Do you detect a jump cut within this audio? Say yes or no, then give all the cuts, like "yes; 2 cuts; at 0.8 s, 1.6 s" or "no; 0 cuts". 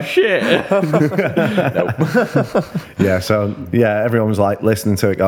no; 0 cuts